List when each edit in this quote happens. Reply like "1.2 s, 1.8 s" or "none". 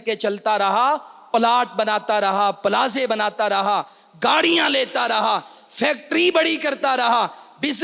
none